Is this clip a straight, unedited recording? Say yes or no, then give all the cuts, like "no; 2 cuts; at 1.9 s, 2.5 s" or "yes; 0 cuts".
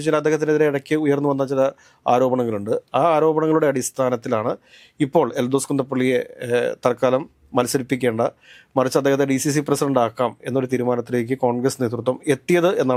yes; 0 cuts